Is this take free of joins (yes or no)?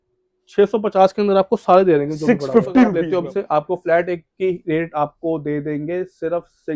no